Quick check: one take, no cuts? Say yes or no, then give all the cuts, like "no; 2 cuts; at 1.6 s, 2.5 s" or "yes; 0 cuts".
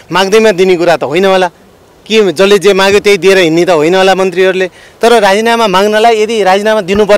yes; 0 cuts